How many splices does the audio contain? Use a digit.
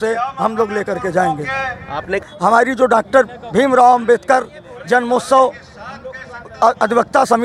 1